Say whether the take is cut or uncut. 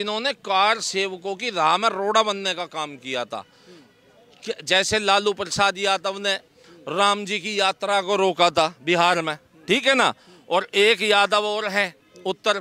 uncut